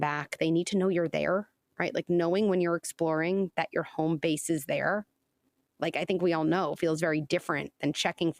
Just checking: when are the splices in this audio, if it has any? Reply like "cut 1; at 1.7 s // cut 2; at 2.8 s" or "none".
none